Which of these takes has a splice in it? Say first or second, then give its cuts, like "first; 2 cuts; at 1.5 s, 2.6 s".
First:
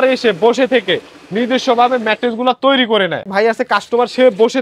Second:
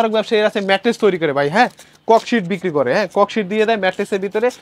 first; 1 cut; at 3.3 s